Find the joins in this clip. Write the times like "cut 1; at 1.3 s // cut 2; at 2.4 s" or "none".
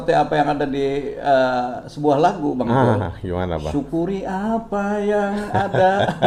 none

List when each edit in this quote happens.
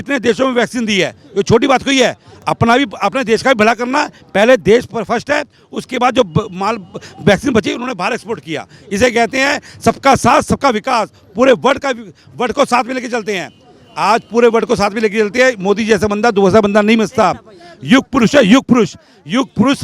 none

